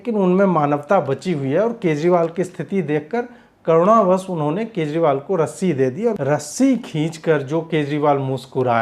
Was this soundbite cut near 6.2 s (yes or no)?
yes